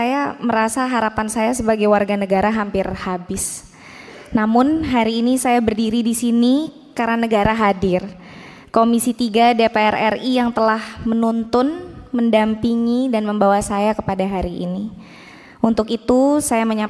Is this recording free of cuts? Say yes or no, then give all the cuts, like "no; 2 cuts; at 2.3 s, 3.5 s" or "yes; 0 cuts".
yes; 0 cuts